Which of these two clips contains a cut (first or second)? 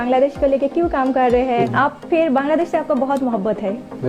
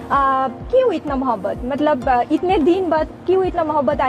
first